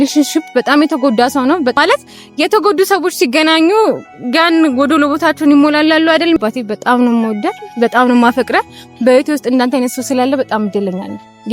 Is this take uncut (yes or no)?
no